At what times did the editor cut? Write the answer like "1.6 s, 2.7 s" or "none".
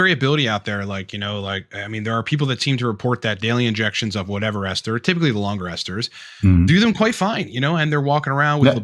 none